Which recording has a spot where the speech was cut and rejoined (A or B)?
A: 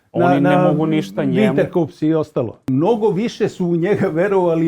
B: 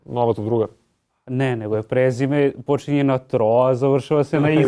A